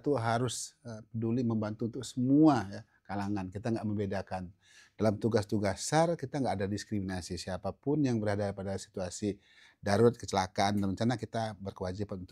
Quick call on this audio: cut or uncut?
uncut